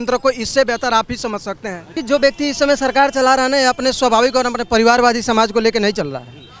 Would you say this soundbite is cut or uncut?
cut